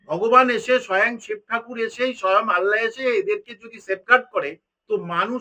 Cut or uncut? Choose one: uncut